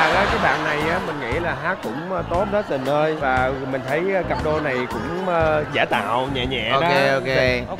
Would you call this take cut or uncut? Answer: uncut